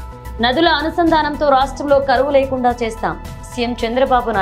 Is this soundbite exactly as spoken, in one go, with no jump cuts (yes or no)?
yes